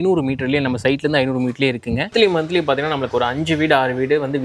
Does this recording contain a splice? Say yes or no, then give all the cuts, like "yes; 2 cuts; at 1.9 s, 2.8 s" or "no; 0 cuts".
yes; 1 cut; at 2.1 s